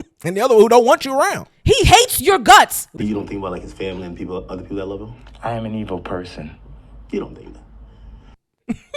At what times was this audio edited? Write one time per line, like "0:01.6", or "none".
0:02.9